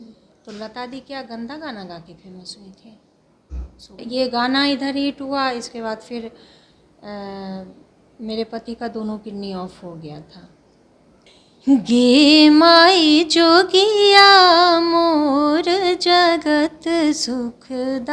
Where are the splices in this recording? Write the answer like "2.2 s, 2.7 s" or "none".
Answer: 4.0 s, 11.1 s